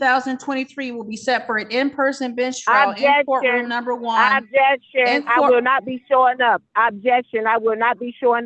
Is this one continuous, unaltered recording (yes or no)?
yes